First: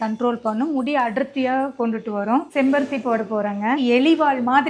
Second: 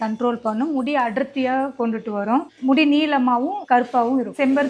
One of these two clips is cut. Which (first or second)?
first